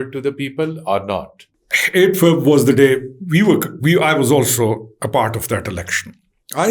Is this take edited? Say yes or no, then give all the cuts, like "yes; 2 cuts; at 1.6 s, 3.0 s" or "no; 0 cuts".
no; 0 cuts